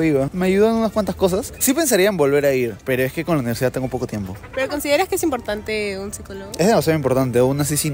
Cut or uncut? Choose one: uncut